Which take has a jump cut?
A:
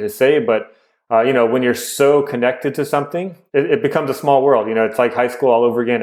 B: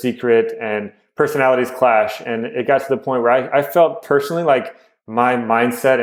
A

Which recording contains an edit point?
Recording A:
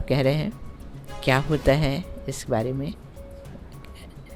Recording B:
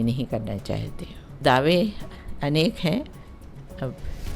B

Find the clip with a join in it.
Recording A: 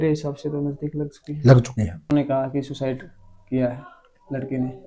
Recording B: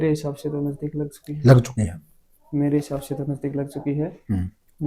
A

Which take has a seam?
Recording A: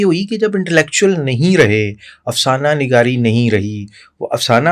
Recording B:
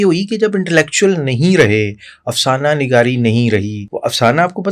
B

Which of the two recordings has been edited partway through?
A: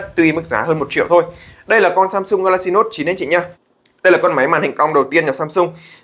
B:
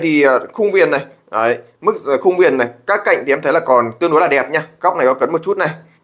A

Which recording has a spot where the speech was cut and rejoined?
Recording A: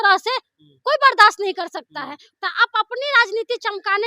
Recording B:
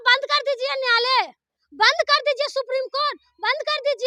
A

